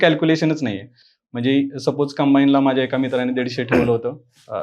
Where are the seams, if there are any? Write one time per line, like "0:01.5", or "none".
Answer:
none